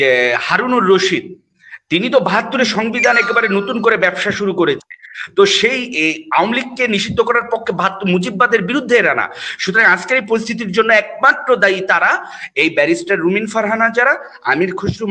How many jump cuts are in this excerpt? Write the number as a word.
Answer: zero